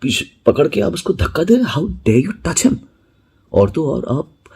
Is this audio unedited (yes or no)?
yes